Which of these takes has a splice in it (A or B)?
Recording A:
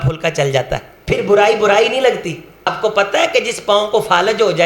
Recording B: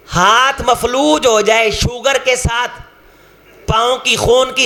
A